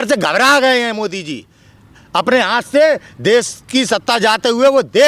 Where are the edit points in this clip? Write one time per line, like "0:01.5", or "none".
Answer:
none

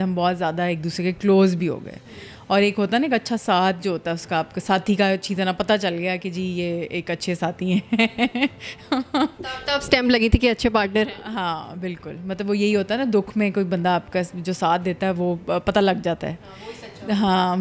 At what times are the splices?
none

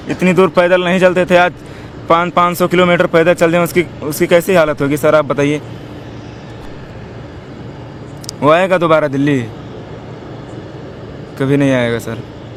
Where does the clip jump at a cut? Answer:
none

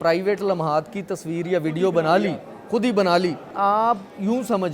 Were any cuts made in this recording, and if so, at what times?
0:03.5

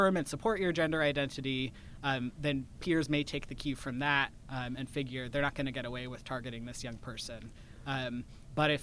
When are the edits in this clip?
none

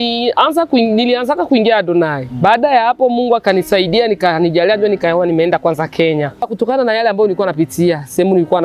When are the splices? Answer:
0:06.5

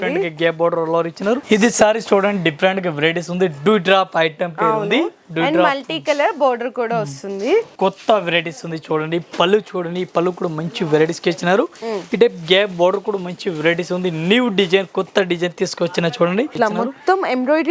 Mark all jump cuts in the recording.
0:01.4
0:07.7
0:16.5

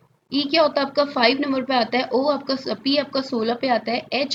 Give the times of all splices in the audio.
none

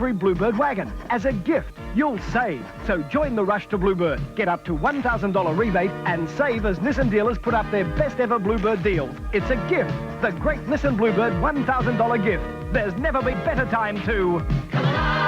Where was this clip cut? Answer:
0:13.3

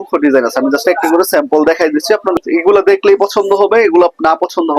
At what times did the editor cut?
0:02.4

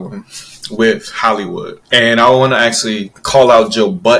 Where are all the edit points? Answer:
0:01.7
0:03.1

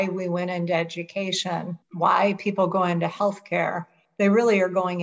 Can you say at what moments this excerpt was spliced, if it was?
0:01.8

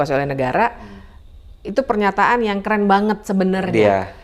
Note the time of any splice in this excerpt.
none

